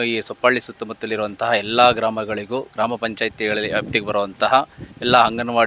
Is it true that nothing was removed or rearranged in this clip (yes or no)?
yes